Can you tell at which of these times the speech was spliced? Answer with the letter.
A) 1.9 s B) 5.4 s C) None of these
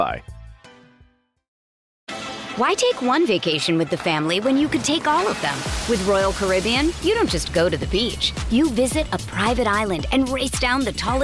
A